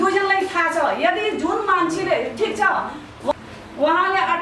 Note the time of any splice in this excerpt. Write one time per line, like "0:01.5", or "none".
0:03.3